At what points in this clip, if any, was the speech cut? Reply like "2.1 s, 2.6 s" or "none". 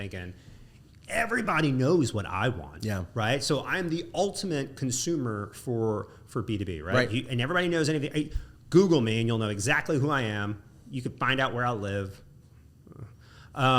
none